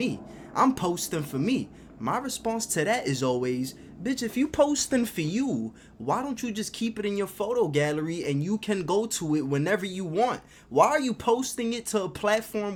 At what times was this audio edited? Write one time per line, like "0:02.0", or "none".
none